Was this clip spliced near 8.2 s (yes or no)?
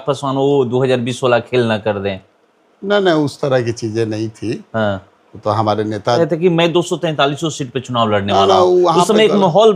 no